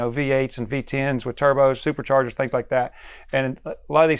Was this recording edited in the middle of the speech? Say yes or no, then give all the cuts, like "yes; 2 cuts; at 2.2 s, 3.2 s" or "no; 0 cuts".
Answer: no; 0 cuts